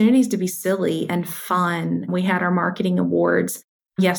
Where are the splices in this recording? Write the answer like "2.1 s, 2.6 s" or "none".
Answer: none